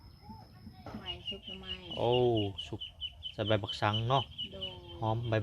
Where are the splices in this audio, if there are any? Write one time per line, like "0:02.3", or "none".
0:01.1